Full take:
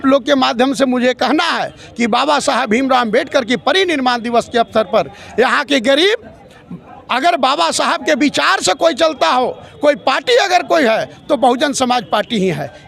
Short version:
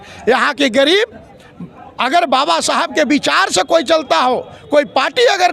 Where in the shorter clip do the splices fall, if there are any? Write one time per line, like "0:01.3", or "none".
none